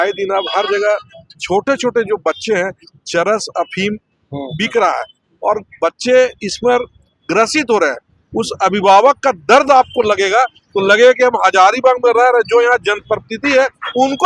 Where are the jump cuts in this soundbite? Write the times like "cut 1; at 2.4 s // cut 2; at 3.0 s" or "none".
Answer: none